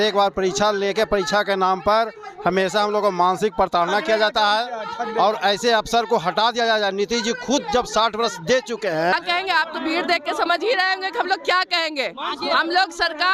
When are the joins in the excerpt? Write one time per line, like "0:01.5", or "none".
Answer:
0:09.1